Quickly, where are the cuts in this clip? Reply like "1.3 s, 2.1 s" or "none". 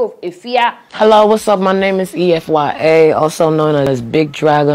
0.9 s